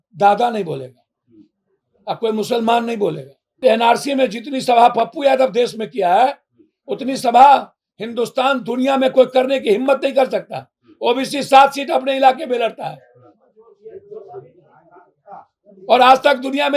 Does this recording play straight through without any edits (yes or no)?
no